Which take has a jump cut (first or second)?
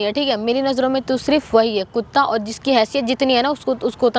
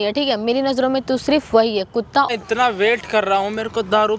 second